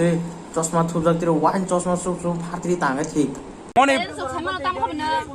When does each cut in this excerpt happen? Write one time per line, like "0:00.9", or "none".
0:03.7